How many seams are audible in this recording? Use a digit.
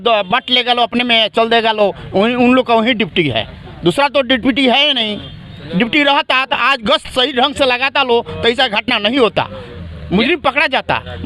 0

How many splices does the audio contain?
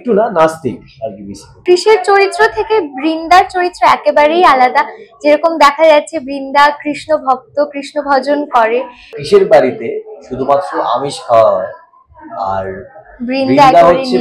2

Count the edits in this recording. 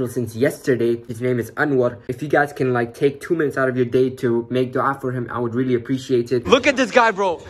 3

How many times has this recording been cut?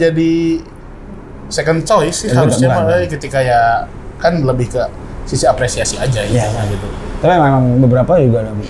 0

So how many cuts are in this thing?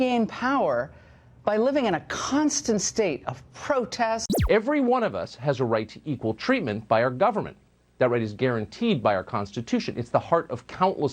1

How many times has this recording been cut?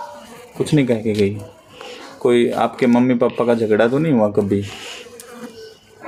0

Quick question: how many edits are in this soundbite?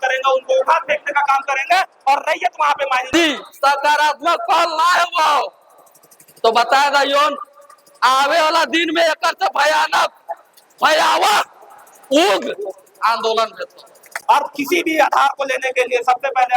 2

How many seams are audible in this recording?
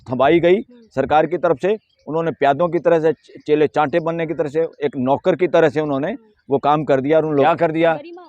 1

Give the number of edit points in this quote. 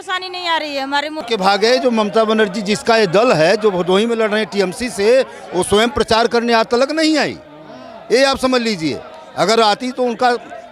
1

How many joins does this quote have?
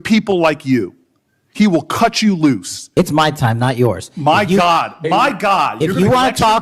1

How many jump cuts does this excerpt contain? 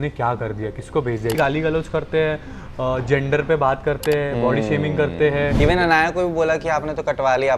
2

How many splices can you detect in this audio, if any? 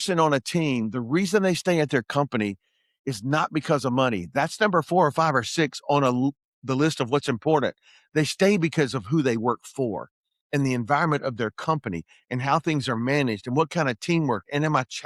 0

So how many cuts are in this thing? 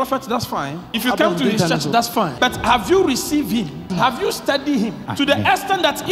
4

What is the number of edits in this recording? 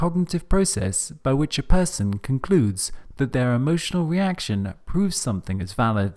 1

